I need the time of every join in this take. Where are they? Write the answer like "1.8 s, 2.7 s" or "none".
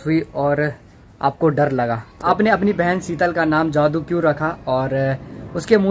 2.3 s